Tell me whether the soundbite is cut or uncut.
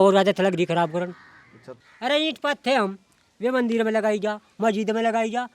cut